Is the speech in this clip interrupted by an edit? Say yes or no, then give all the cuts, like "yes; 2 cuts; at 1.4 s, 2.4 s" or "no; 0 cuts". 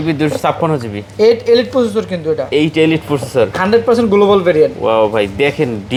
no; 0 cuts